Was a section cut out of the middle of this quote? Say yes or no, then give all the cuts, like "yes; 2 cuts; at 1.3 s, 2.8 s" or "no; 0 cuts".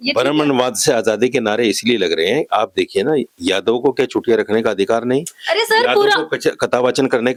no; 0 cuts